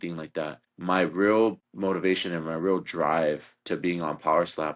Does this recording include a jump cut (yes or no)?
no